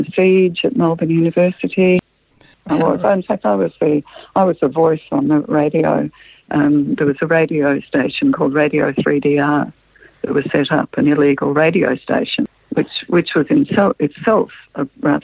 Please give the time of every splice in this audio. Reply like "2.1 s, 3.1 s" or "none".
2.3 s